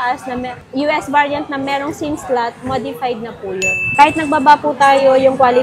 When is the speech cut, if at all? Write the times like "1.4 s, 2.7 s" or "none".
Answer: 3.8 s